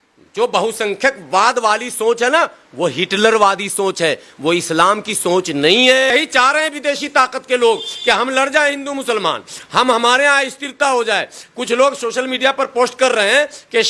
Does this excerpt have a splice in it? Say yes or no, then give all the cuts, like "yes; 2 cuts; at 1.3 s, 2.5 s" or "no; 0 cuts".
yes; 1 cut; at 6.1 s